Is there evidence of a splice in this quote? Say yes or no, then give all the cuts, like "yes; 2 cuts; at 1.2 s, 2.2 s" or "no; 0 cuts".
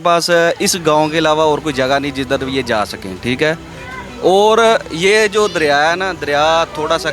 no; 0 cuts